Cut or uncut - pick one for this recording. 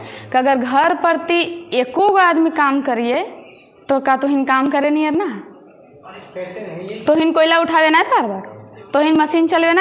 uncut